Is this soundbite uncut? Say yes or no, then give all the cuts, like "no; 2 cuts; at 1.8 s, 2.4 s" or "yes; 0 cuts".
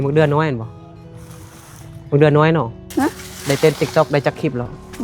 no; 1 cut; at 2.8 s